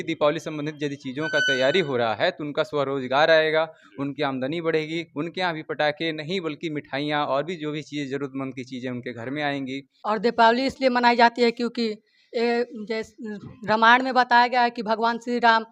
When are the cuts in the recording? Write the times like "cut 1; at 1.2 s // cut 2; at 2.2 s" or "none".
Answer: cut 1; at 9.9 s